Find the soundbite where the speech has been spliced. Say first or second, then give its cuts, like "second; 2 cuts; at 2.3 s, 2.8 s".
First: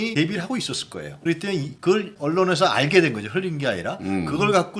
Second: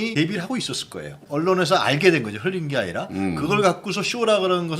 second; 1 cut; at 1.2 s